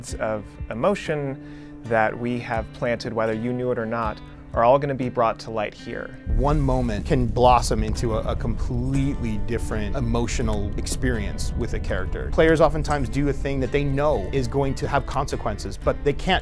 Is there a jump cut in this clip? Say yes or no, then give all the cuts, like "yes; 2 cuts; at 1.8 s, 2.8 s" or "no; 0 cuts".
yes; 1 cut; at 6.1 s